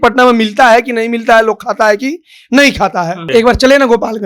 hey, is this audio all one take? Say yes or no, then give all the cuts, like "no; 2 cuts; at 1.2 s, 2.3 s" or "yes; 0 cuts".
no; 1 cut; at 3.2 s